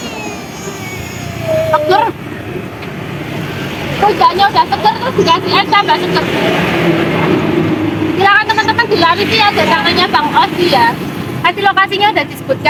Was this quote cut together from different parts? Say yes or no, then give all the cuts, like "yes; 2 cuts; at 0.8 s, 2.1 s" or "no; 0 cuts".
no; 0 cuts